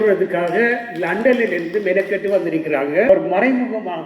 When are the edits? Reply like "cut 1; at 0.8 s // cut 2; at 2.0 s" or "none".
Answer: cut 1; at 3.1 s